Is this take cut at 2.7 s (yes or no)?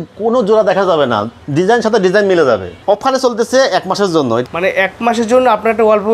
yes